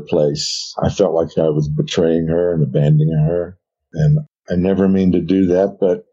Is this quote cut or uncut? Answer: uncut